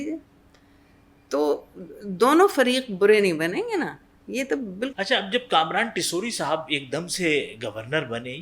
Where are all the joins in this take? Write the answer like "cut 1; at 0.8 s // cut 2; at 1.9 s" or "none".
cut 1; at 4.9 s